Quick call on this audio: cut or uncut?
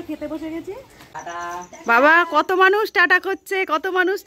cut